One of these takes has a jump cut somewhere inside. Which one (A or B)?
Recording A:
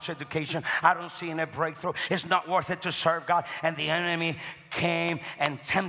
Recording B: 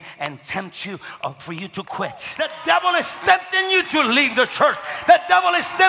B